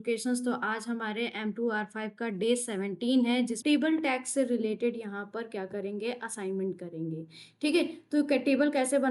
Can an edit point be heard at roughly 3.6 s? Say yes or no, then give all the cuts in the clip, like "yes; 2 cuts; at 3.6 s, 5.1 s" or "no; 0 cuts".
yes; 1 cut; at 3.6 s